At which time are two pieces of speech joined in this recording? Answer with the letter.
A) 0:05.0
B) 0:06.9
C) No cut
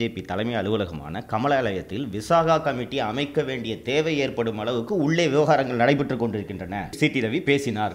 B